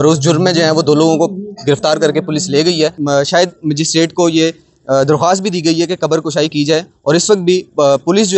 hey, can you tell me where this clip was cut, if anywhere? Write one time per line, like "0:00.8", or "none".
0:03.0